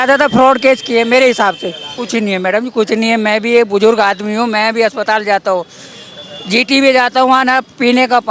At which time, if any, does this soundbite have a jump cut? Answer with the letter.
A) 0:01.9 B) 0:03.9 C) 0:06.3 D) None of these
A